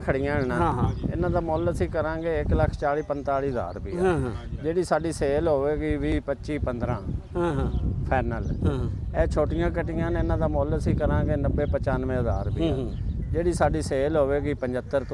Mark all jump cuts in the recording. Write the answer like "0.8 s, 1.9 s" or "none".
none